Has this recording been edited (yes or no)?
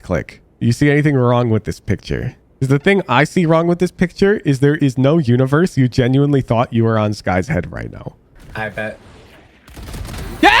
yes